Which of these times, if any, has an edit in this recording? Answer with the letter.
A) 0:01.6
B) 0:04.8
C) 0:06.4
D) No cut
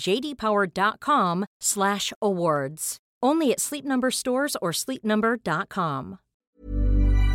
C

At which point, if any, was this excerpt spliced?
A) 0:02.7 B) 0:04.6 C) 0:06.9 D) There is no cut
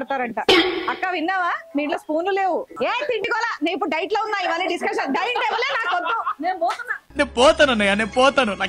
A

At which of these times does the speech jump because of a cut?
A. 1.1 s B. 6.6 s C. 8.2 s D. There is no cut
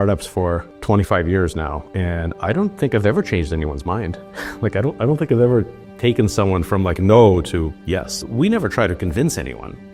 C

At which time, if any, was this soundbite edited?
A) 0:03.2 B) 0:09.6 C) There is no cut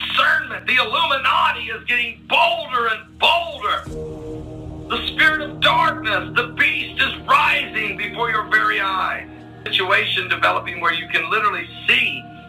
C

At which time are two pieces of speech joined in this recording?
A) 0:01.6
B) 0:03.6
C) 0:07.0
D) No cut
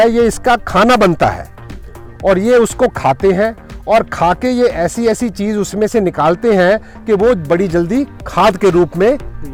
D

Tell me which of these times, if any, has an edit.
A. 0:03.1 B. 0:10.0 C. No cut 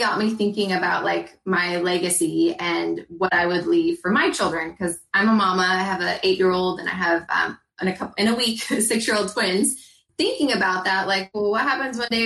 B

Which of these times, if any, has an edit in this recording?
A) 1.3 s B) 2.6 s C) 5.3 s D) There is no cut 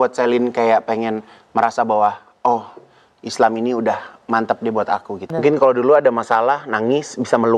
C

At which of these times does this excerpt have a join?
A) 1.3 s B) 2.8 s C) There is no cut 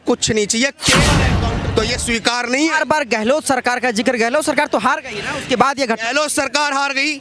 A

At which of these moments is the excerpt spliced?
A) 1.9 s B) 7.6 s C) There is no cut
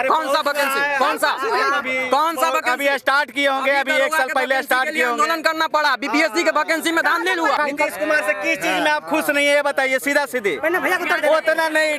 B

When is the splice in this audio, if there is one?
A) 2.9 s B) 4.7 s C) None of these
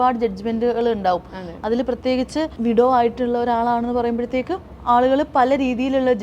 B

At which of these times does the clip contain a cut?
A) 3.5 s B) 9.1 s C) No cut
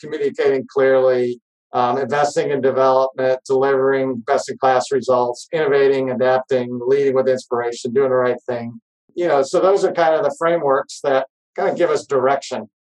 B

